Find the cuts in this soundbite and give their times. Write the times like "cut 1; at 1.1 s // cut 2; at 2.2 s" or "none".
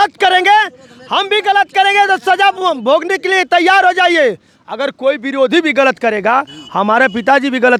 none